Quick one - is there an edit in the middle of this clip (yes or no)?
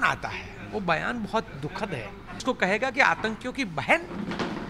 yes